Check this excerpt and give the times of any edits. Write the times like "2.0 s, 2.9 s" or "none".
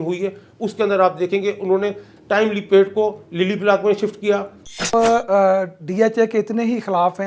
4.9 s